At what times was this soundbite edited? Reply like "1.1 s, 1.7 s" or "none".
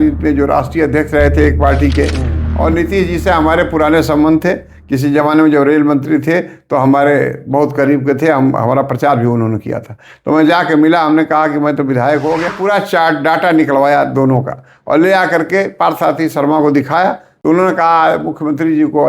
2.4 s, 12.5 s, 17.3 s